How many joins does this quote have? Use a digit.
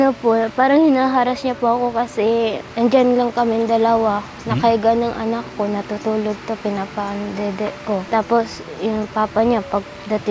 2